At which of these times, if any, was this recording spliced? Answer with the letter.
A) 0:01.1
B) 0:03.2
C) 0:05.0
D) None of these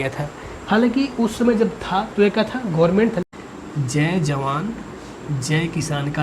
B